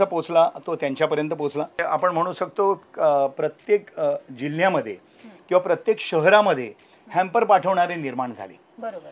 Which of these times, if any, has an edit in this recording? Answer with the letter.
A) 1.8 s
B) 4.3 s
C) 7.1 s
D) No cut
A